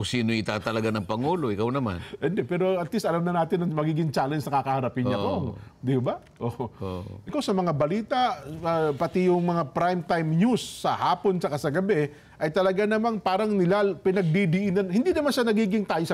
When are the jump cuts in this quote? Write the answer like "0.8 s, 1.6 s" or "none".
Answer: 7.3 s